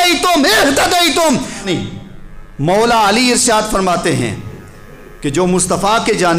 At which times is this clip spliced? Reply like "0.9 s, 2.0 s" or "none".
1.6 s